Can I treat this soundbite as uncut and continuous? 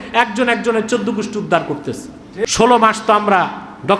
no; 1 cut; at 2.5 s

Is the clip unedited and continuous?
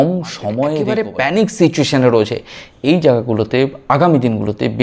no; 1 cut; at 0.9 s

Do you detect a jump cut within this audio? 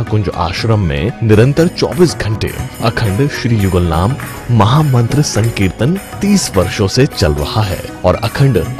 no; 0 cuts

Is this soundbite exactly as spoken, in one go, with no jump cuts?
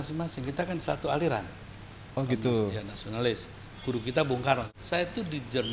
no; 1 cut; at 4.7 s

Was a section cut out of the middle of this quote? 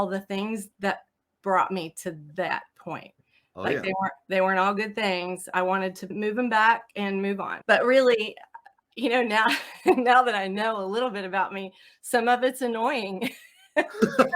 yes; 2 cuts; at 6.1 s, 7.5 s

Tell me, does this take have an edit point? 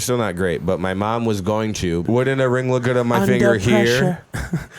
yes; 1 cut; at 2.0 s

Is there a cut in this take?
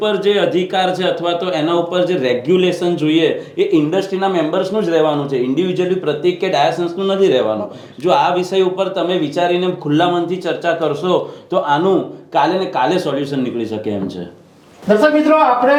no; 0 cuts

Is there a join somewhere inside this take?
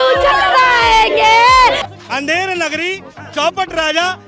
yes; 1 cut; at 1.9 s

